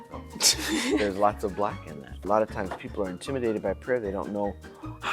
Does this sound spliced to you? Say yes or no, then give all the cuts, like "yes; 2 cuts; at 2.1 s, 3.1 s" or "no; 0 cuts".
yes; 1 cut; at 2.2 s